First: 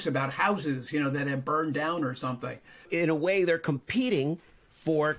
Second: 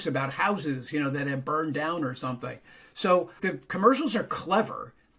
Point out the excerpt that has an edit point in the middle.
first; 1 cut; at 2.9 s

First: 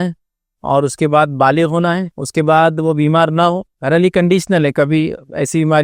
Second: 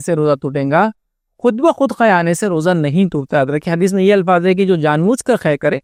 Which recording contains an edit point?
first; 2 cuts; at 2.1 s, 3.7 s

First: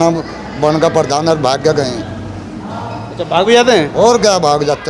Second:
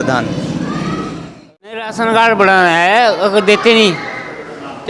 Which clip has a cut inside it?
second; 1 cut; at 1.3 s

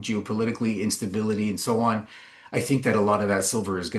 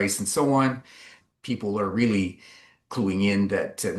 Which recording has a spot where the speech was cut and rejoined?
second; 1 cut; at 1.2 s

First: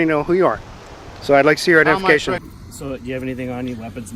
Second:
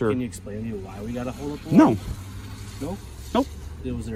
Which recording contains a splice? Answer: first; 1 cut; at 2.5 s

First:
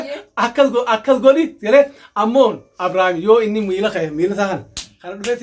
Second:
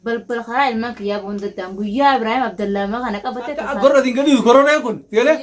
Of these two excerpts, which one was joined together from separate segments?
second; 1 cut; at 3.7 s

